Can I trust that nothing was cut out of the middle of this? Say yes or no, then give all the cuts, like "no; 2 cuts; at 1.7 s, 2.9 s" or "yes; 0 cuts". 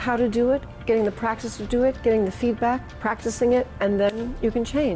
no; 1 cut; at 2.9 s